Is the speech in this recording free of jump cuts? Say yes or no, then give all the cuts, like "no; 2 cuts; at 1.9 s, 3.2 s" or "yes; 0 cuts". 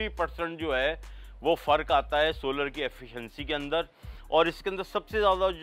yes; 0 cuts